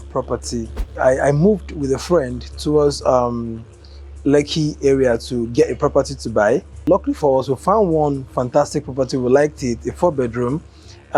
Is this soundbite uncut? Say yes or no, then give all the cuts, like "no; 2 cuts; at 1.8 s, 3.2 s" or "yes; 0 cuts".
no; 2 cuts; at 0.9 s, 6.9 s